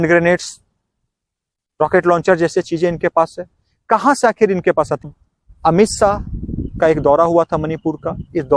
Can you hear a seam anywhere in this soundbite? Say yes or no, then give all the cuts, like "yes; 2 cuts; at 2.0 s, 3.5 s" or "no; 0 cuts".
yes; 1 cut; at 5.1 s